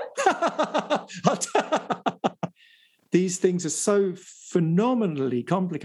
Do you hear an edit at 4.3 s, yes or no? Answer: no